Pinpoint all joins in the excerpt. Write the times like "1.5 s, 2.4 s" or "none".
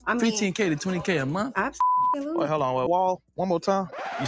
2.9 s